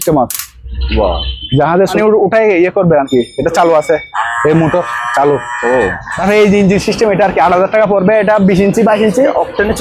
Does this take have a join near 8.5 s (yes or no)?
no